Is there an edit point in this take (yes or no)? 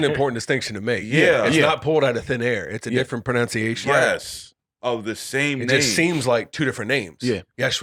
no